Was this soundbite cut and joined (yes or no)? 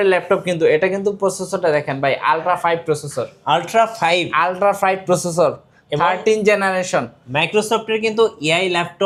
no